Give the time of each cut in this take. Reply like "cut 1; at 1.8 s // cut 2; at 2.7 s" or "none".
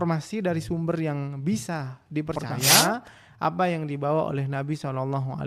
cut 1; at 2.9 s

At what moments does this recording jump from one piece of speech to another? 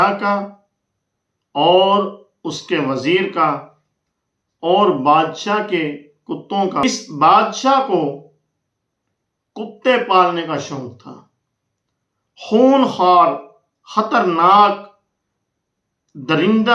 cut 1; at 6.8 s

